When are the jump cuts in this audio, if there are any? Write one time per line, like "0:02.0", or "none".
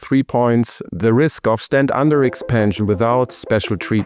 none